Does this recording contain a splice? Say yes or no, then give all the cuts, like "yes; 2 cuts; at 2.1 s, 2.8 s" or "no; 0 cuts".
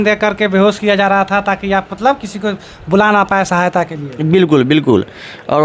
no; 0 cuts